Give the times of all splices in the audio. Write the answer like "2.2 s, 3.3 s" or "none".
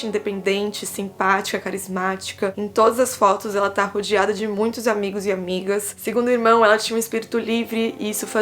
2.5 s